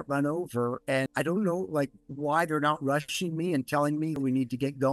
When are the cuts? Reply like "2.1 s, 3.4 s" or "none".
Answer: 1.1 s, 4.2 s